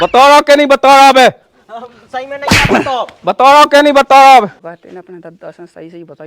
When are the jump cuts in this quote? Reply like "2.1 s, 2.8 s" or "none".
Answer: 4.6 s